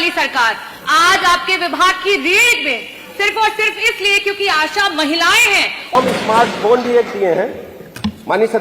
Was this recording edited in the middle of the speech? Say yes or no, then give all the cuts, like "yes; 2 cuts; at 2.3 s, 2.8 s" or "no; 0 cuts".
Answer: yes; 1 cut; at 6.0 s